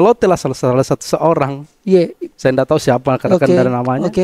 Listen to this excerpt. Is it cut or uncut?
uncut